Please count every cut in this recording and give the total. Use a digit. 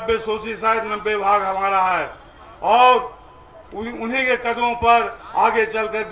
0